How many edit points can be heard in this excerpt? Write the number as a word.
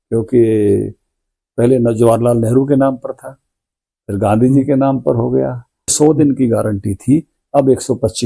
one